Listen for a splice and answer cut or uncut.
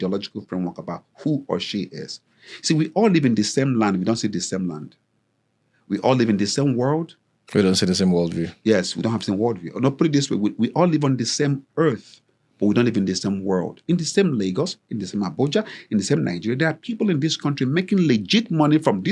uncut